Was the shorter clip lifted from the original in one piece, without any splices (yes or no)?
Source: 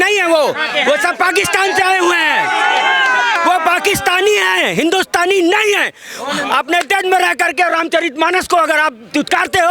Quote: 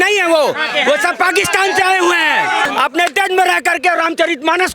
no